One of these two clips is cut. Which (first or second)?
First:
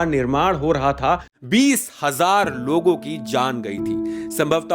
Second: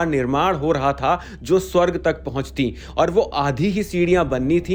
first